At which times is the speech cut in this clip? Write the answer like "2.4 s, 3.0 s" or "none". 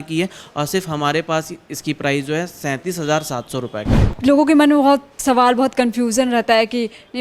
4.0 s